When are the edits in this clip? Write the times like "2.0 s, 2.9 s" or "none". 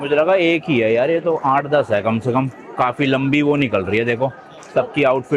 none